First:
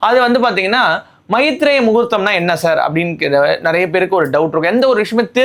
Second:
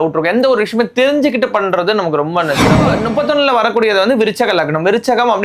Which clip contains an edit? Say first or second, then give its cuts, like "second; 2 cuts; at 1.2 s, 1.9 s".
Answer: second; 1 cut; at 2.9 s